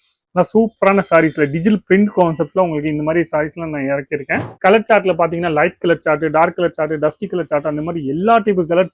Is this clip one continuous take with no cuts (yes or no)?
no